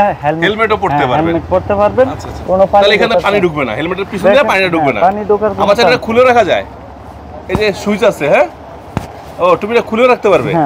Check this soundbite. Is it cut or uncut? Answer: uncut